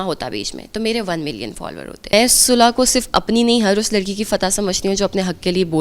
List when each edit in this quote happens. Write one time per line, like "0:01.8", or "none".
0:02.1